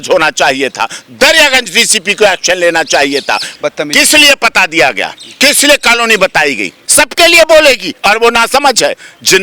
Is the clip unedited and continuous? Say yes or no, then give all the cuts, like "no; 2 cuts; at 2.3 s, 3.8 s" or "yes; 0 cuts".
no; 2 cuts; at 3.5 s, 6.8 s